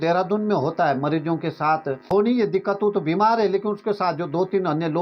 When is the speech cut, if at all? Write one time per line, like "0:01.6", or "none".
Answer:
0:02.1